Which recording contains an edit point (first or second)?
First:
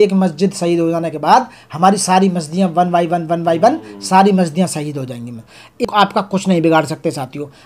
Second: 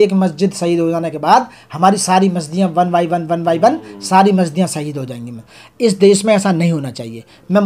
first